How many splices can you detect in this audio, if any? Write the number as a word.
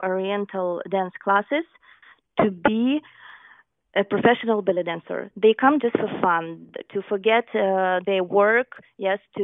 zero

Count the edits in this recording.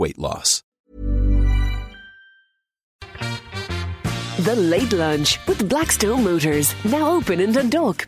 one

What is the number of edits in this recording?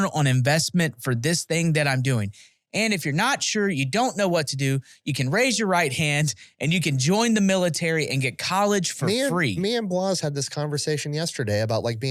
zero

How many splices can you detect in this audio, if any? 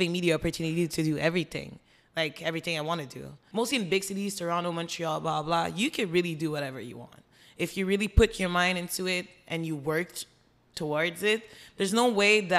one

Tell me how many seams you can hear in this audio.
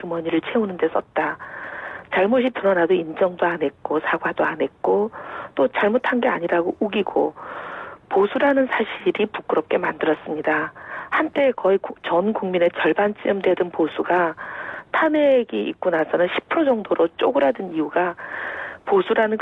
one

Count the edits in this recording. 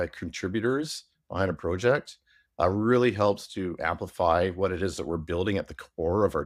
zero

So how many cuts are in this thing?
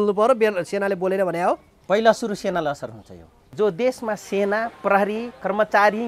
one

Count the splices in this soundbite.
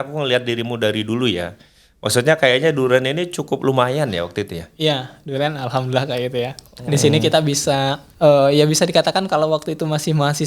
one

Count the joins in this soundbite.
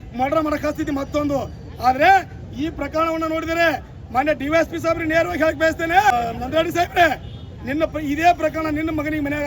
one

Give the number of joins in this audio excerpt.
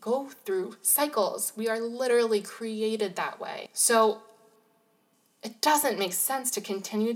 one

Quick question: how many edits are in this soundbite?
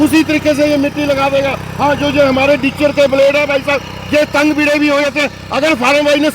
zero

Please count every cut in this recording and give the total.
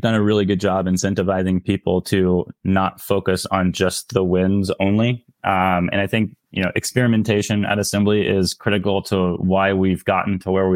zero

